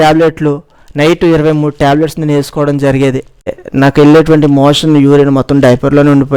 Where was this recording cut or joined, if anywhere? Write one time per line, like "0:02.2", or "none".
0:03.6